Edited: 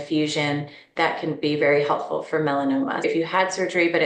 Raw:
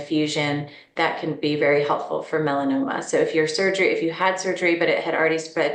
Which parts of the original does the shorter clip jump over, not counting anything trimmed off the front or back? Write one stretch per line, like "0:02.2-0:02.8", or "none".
0:03.0-0:03.9

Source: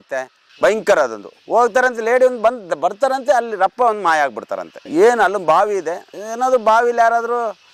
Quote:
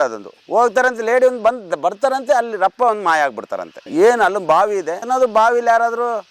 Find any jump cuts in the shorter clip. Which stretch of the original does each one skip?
0:05.9-0:06.3

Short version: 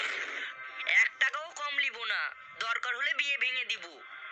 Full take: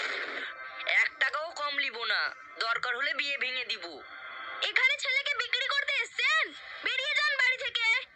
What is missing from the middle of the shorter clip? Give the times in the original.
none

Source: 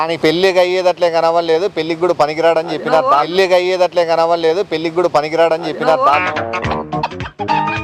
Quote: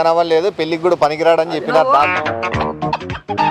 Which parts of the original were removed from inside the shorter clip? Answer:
0:03.3-0:06.2

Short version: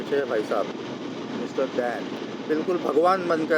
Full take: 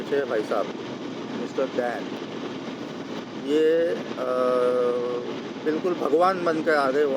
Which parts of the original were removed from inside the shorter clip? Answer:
0:02.3-0:05.4

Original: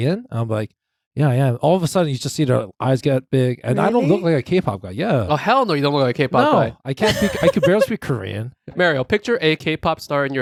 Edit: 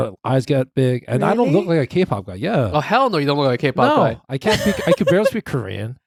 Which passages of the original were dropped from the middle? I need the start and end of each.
none

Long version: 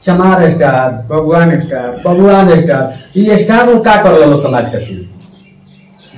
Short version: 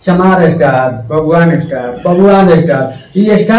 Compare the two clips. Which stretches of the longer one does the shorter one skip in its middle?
none

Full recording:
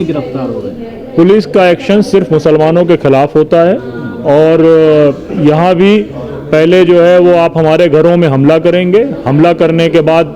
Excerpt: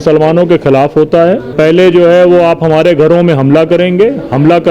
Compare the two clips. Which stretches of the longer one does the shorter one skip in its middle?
0:03.9-0:06.4

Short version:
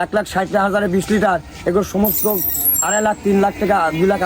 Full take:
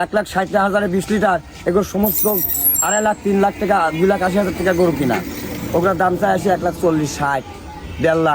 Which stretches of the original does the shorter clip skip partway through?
none

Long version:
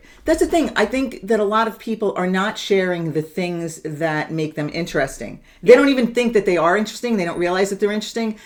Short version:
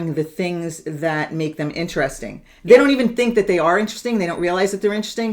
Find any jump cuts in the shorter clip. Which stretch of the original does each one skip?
none

